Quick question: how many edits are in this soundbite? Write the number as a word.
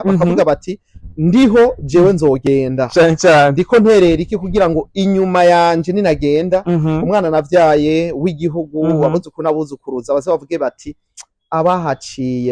zero